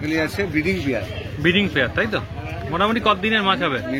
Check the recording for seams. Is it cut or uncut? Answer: uncut